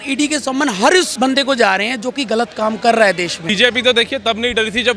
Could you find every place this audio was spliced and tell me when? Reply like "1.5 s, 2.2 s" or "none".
1.1 s, 3.5 s